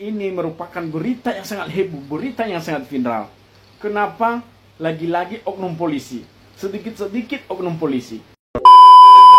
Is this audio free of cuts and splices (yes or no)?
no